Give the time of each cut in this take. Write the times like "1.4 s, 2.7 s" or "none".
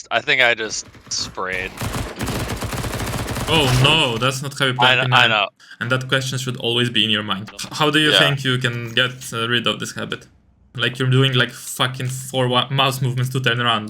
5.6 s, 7.4 s, 10.7 s